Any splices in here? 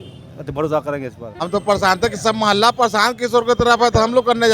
yes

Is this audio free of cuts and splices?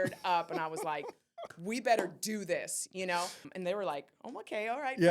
no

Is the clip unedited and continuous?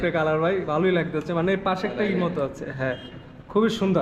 yes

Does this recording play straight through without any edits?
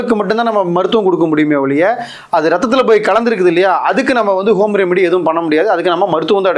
yes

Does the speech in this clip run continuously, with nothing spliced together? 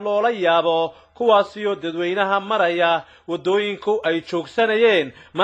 yes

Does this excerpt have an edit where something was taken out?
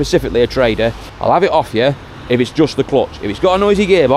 yes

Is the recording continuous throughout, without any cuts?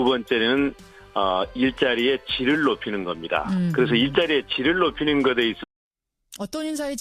yes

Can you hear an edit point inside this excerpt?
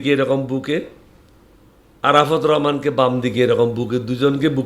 no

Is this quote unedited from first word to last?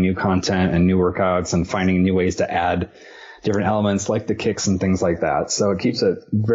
yes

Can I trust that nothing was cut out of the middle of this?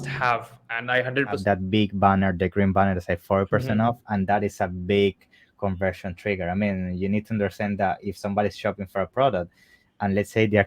no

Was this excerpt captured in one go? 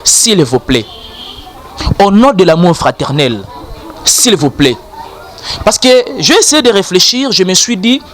yes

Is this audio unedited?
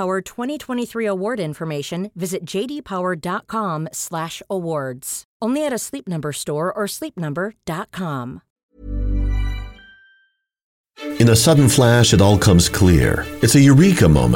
no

